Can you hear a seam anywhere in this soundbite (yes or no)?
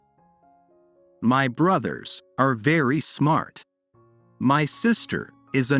yes